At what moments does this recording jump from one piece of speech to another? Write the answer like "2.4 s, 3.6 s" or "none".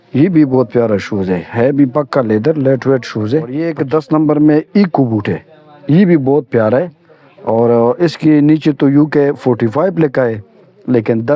3.7 s